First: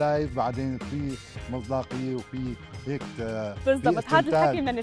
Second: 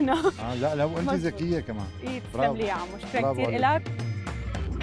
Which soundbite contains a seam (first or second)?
second